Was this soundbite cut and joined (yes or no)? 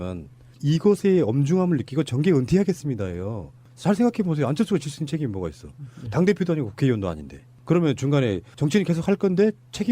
no